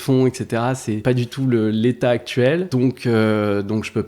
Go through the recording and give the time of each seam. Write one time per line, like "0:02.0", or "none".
0:01.0
0:02.7

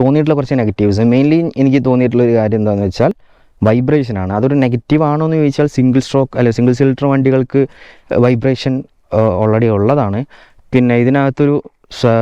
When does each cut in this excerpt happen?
none

